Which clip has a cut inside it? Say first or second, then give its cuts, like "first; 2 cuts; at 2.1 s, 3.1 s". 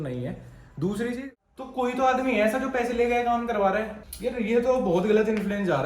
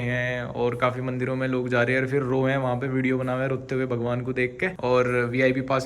first; 1 cut; at 1.3 s